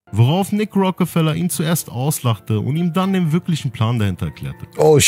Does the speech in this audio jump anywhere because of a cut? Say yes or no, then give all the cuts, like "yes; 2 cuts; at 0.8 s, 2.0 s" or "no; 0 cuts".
no; 0 cuts